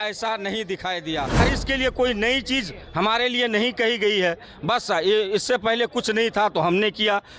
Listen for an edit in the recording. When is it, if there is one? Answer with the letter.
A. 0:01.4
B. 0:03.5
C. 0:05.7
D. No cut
A